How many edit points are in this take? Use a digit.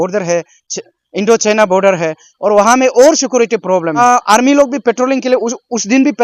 1